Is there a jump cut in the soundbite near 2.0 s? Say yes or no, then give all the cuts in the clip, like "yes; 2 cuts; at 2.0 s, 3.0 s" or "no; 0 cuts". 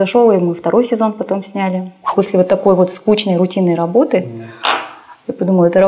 yes; 1 cut; at 2.0 s